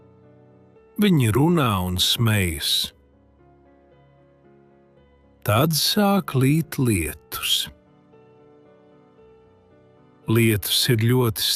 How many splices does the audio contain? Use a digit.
5